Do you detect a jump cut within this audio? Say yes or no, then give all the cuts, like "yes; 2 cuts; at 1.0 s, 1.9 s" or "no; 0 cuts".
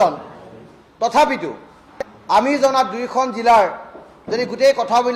no; 0 cuts